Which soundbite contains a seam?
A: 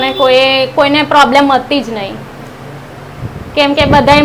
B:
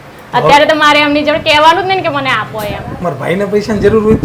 B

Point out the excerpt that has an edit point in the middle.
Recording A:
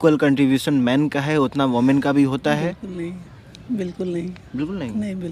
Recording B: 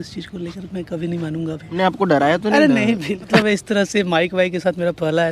B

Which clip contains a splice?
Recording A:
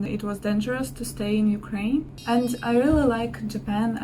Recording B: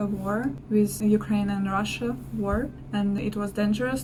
A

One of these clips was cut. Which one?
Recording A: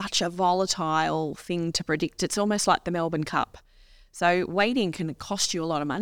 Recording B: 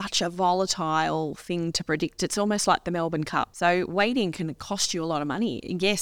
B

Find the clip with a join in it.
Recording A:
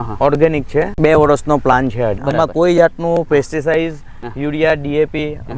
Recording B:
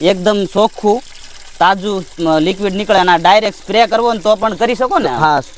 A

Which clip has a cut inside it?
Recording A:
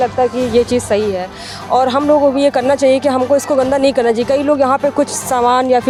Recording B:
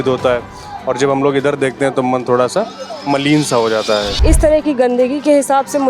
B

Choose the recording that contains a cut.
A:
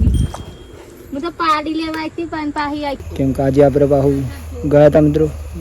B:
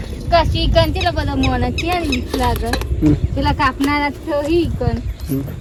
A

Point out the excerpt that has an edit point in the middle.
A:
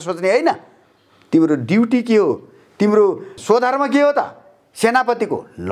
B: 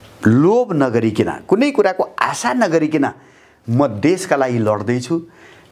A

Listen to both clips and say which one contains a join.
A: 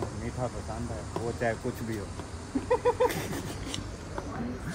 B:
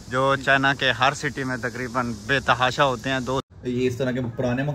B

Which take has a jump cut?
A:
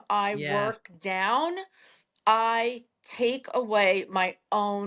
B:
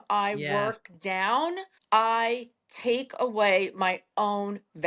B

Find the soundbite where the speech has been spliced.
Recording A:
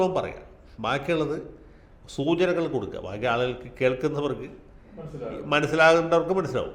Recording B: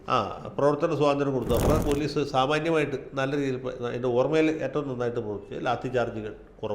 B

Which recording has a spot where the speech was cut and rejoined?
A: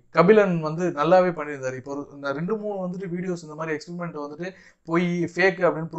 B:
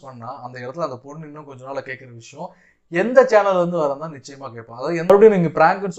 B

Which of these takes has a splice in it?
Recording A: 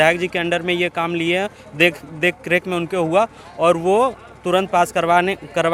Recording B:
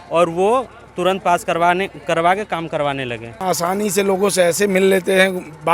B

